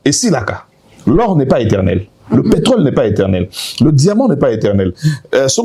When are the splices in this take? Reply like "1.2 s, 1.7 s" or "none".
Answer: none